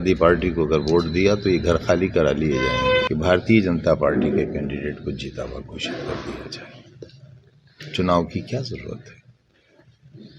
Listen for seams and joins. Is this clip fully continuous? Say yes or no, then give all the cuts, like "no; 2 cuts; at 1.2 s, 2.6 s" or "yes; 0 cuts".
no; 1 cut; at 3.1 s